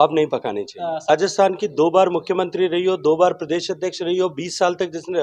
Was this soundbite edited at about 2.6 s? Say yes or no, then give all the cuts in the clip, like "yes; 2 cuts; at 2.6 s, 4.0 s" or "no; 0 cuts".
no; 1 cut; at 1.1 s